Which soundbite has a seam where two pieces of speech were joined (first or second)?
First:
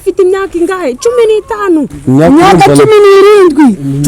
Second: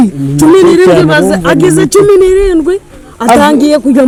first